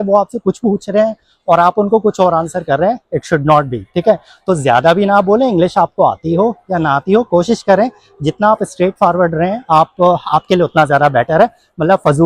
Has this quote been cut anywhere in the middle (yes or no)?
no